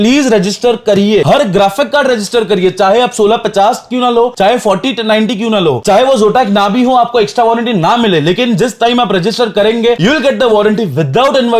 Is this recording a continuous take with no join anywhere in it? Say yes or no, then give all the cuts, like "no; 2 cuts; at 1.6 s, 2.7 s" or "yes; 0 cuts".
yes; 0 cuts